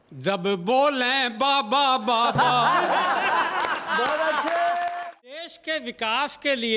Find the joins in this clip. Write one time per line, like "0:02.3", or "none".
0:05.4